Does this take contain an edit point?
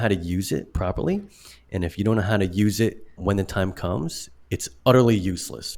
yes; 1 cut; at 3.1 s

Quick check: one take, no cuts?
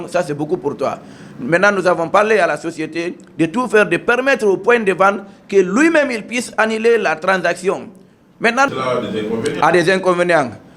no; 1 cut; at 8.7 s

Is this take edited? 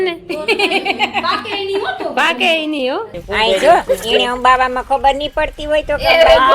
yes; 1 cut; at 3.2 s

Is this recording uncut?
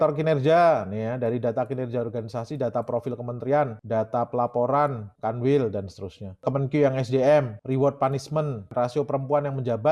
no; 5 cuts; at 3.8 s, 5.1 s, 6.5 s, 7.6 s, 8.7 s

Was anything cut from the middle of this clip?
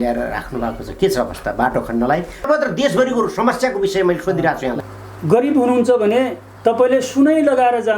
yes; 2 cuts; at 2.4 s, 4.8 s

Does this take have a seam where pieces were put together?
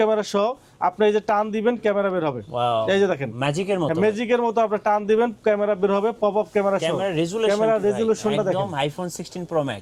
no; 0 cuts

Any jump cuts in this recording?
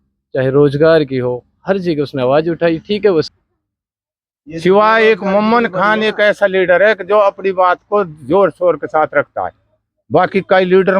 yes; 1 cut; at 3.3 s

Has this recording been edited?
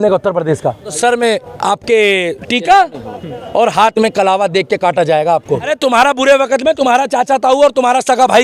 yes; 2 cuts; at 1.0 s, 5.7 s

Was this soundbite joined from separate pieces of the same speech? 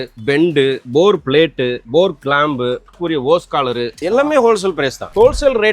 yes; 4 cuts; at 0.8 s, 1.8 s, 3.0 s, 4.0 s

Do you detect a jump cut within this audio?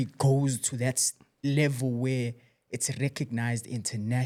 no; 0 cuts

